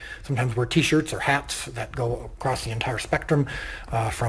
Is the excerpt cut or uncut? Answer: uncut